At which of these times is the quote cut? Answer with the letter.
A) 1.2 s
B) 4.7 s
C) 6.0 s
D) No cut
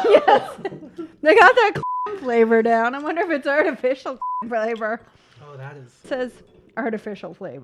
C